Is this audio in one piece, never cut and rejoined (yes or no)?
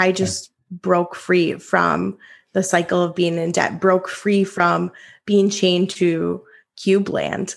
yes